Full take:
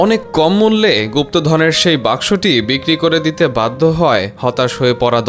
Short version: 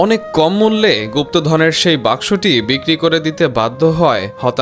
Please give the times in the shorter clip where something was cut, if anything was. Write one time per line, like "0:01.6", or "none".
none